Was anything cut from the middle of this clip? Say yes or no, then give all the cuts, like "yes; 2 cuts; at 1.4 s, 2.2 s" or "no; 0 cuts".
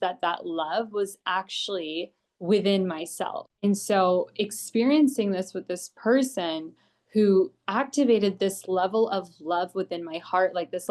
no; 0 cuts